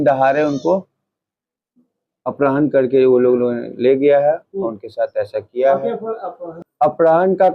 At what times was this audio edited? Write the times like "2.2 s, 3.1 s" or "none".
6.5 s